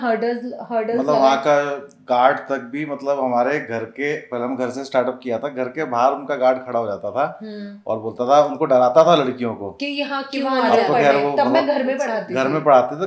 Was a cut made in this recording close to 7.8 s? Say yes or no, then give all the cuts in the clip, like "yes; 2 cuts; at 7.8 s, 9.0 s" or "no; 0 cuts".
no; 0 cuts